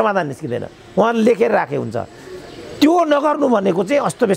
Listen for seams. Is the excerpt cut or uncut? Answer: uncut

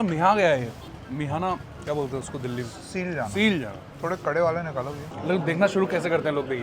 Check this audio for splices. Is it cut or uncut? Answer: cut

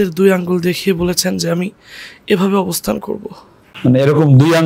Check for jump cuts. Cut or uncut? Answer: uncut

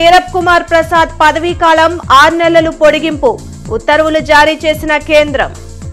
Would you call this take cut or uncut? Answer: uncut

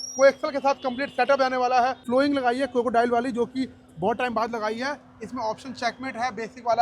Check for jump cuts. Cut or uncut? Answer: uncut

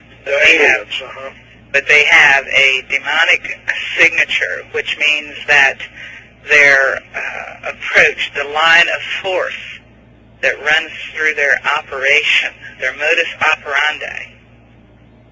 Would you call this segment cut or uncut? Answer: cut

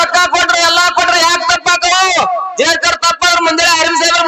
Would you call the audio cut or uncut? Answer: uncut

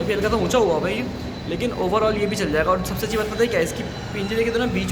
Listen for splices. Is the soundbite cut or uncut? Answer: uncut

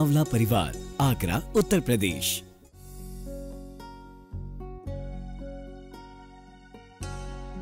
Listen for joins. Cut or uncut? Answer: cut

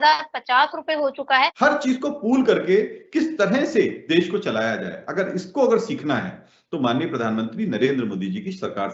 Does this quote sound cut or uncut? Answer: cut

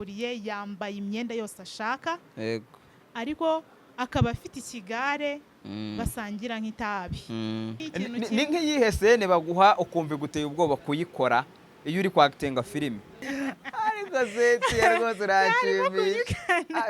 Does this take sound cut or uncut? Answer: cut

